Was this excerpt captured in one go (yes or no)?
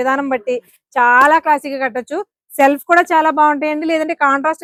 yes